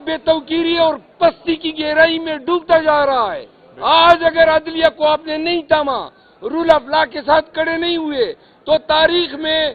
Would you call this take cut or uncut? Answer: uncut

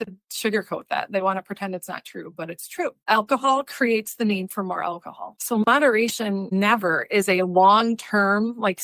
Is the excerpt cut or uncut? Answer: uncut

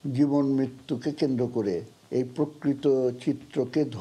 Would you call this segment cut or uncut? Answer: cut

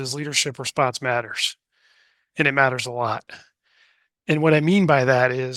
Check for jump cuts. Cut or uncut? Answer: uncut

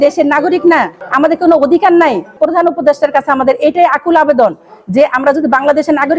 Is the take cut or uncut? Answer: cut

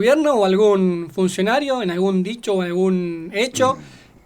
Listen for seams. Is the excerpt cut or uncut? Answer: uncut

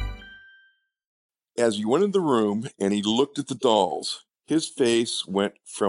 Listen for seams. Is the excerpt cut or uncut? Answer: cut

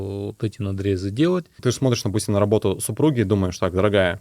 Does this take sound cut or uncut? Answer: cut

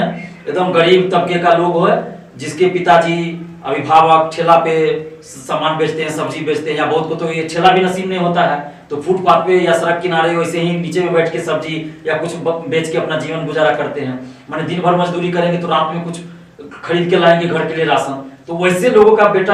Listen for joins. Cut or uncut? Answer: uncut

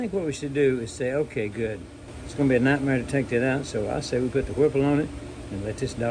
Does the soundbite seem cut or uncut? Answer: uncut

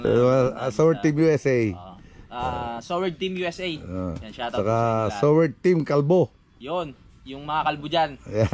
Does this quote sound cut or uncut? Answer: uncut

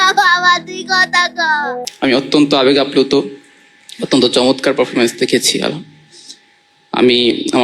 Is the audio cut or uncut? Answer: cut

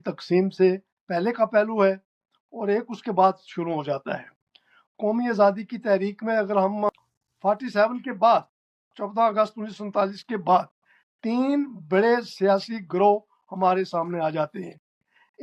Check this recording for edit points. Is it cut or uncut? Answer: cut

